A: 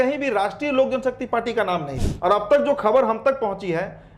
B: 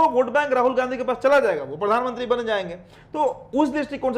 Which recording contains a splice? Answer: A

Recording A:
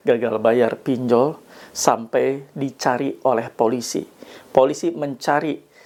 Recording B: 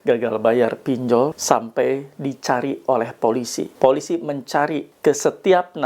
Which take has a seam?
B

